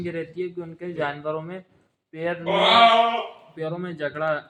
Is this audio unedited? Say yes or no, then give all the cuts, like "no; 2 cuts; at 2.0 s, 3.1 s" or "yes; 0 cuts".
yes; 0 cuts